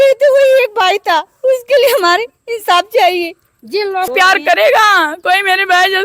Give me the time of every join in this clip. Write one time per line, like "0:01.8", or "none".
0:04.1